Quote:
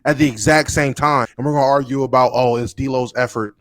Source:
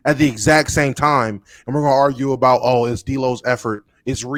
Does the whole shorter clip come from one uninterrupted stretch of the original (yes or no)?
no